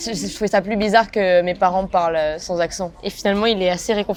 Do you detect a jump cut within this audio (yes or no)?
no